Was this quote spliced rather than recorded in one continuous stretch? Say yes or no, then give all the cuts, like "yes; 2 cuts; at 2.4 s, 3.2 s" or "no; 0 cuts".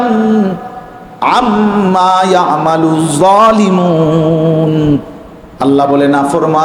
no; 0 cuts